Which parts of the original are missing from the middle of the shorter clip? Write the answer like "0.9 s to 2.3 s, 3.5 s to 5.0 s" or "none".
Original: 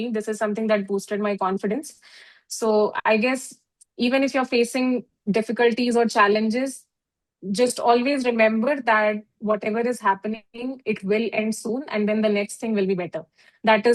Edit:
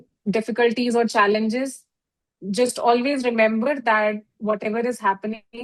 none